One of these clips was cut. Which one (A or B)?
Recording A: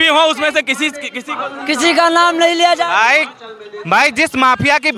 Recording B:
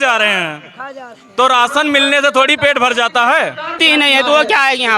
B